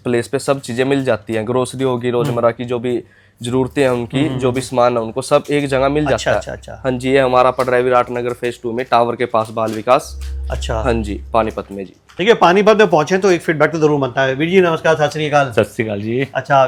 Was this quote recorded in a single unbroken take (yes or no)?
yes